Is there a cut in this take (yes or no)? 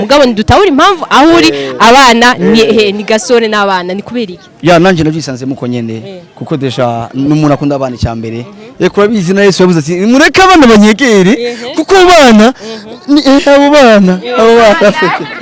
no